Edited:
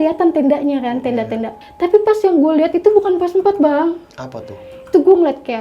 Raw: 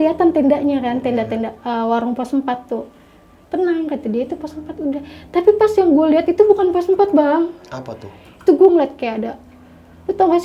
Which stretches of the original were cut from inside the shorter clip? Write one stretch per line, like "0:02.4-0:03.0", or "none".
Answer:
0:01.6-0:05.1